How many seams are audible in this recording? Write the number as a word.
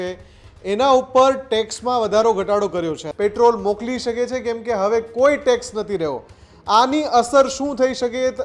one